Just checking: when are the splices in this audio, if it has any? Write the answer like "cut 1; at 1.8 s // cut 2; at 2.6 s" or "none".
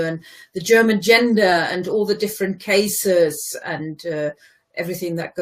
none